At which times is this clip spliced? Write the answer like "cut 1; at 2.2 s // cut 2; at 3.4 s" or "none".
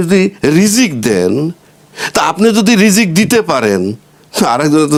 none